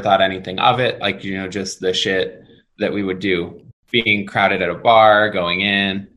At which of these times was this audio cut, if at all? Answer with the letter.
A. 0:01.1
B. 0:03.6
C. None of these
B